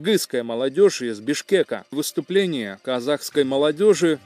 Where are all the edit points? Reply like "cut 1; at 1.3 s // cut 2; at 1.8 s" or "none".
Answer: cut 1; at 2.0 s